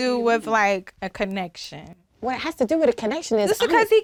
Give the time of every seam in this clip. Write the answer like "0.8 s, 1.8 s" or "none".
none

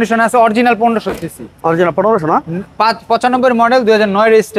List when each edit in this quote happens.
none

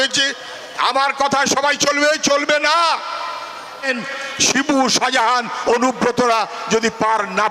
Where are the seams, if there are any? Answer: 3.9 s

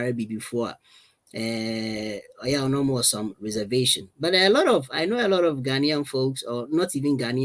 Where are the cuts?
none

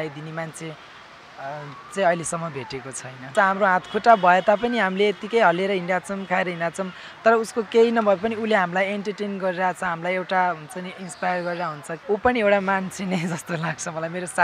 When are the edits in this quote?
3.3 s, 11.9 s

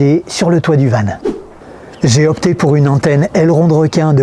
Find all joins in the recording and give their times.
none

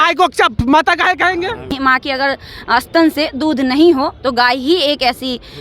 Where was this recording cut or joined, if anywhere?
1.7 s

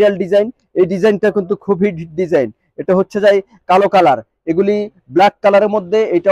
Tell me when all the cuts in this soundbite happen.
none

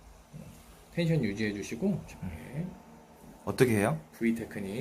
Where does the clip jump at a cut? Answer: 2.0 s

